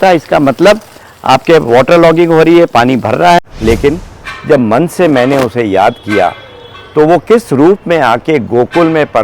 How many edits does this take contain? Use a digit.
1